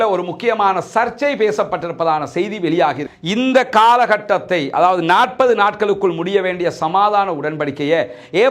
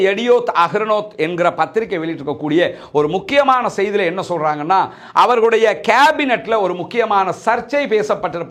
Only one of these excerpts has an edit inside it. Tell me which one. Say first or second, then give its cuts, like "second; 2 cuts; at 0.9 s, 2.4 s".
first; 1 cut; at 3.1 s